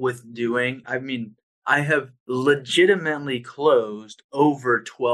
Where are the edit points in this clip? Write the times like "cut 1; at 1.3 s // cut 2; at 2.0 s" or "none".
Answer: cut 1; at 0.8 s // cut 2; at 2.2 s